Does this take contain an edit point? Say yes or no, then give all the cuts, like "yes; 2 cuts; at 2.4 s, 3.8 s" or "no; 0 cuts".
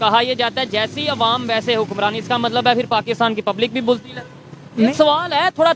no; 0 cuts